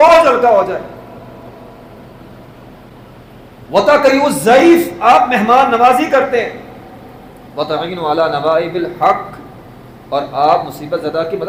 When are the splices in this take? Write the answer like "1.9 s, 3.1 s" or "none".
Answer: none